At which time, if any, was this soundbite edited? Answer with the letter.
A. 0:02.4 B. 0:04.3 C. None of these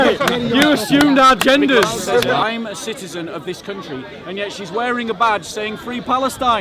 A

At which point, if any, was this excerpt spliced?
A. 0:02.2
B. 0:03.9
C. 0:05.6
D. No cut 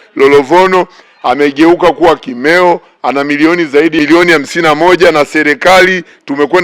D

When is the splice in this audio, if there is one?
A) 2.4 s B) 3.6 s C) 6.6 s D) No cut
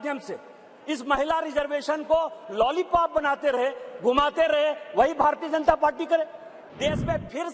C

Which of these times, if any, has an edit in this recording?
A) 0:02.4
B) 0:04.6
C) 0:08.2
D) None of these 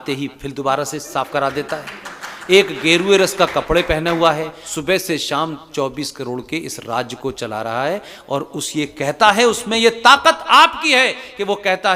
B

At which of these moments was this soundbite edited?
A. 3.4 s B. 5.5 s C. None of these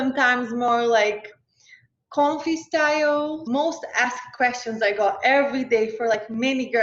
A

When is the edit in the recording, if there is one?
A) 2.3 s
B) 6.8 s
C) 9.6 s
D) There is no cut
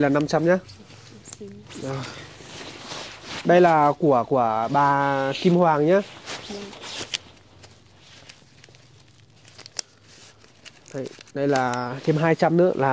D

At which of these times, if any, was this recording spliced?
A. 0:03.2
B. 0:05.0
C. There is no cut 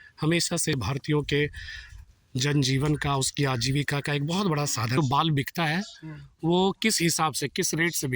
B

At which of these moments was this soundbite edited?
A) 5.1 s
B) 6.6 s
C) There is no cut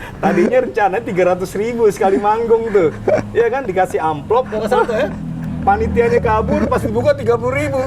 C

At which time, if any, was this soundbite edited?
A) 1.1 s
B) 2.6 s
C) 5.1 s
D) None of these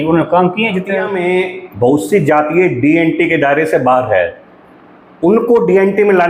A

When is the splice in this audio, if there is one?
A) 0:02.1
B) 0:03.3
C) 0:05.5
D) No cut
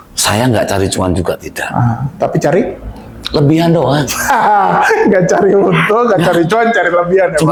D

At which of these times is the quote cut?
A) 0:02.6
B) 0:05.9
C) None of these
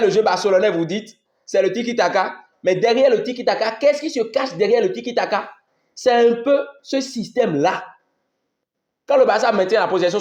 C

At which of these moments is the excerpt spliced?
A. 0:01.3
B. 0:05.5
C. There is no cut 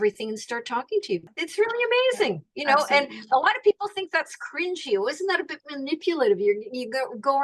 A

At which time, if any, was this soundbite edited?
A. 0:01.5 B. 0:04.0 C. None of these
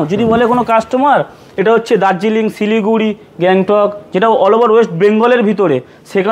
C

